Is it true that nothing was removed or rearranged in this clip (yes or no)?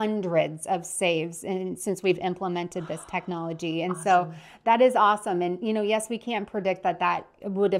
yes